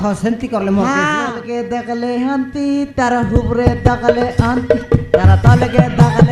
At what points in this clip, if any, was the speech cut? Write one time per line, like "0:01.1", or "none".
0:01.4